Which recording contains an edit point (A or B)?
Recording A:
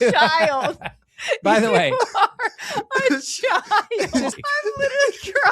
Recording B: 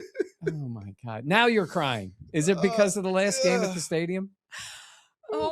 A